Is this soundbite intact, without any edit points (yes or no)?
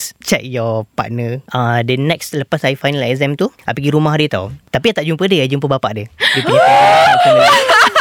no